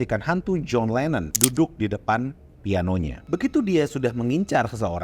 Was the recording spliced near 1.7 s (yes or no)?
no